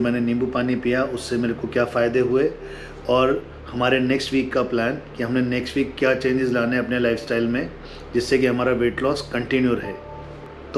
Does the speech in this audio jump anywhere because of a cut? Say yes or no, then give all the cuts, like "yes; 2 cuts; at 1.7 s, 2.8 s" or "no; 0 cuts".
no; 0 cuts